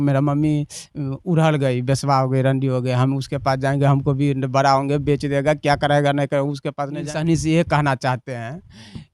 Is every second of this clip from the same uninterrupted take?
no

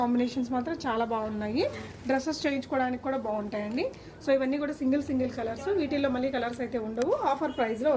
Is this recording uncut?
yes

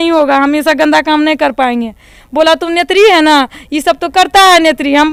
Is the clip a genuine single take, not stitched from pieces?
yes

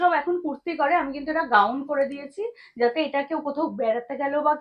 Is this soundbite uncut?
yes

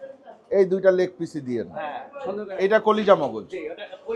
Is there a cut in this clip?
no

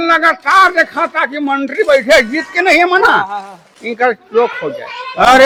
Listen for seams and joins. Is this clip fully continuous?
yes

